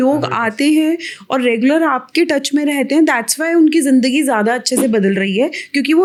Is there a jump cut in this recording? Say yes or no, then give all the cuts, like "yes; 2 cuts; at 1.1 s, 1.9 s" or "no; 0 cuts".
no; 0 cuts